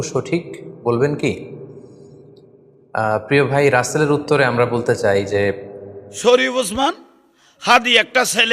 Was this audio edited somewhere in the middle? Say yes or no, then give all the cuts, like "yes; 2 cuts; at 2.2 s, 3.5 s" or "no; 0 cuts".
yes; 1 cut; at 6.3 s